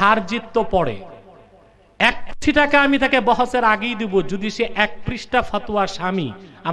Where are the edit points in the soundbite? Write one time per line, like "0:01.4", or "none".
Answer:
none